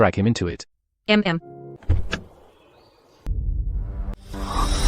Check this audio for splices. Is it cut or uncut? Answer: cut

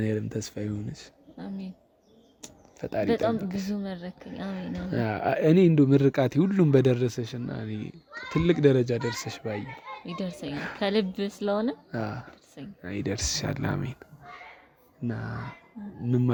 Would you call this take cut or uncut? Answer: uncut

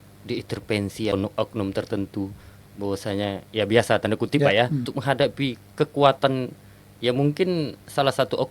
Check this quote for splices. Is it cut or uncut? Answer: cut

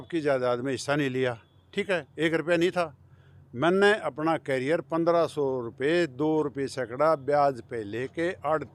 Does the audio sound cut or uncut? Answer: uncut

